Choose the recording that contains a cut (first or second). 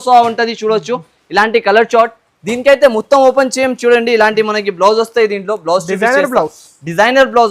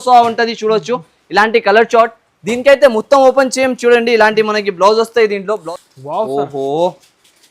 second